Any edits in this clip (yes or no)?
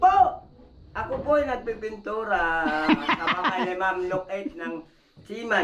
no